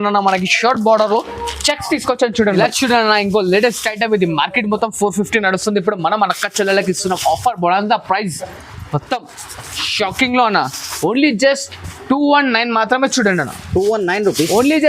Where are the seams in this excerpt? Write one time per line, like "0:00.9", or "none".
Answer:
0:02.5